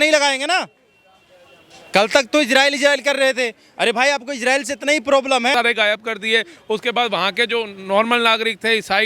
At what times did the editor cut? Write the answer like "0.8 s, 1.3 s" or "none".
5.5 s